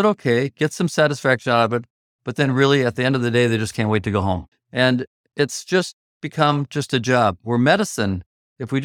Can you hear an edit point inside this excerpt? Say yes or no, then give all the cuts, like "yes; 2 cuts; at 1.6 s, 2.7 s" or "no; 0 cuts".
yes; 2 cuts; at 4.6 s, 5.2 s